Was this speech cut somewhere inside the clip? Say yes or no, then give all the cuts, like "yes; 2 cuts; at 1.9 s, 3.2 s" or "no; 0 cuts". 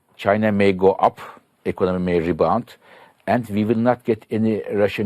no; 0 cuts